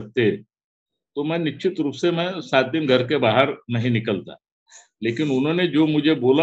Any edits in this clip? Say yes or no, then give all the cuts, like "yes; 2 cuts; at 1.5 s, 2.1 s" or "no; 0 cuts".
no; 0 cuts